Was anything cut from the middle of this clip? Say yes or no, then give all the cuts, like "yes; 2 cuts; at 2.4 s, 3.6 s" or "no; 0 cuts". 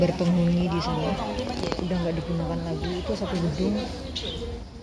no; 0 cuts